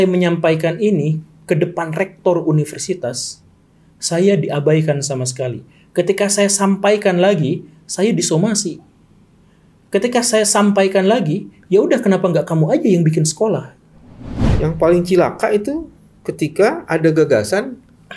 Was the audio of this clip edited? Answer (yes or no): yes